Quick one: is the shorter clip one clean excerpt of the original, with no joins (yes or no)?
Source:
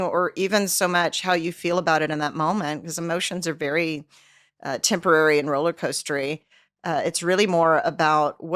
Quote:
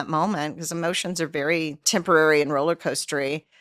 no